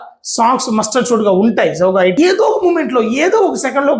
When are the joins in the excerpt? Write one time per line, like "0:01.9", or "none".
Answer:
0:02.2